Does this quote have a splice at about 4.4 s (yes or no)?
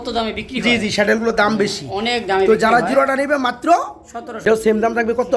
yes